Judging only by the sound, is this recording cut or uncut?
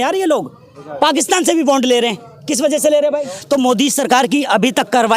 cut